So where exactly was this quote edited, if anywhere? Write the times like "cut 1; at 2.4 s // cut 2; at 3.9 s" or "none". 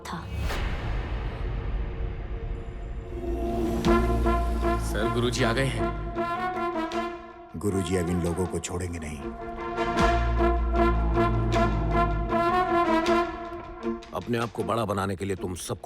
cut 1; at 3.3 s